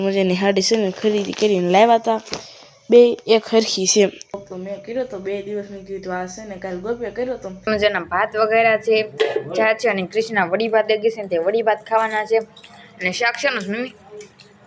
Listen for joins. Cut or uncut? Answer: cut